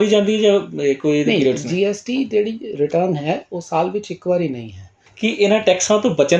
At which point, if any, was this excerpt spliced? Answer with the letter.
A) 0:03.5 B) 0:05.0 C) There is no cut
B